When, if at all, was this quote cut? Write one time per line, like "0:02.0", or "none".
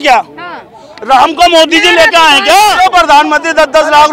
0:02.7